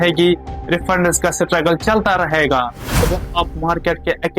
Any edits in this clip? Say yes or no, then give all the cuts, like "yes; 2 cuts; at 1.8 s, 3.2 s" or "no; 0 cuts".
yes; 1 cut; at 2.8 s